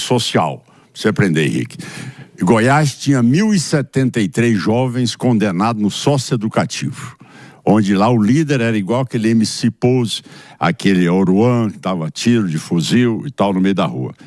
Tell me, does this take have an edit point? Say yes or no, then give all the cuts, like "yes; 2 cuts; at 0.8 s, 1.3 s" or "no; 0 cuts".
no; 0 cuts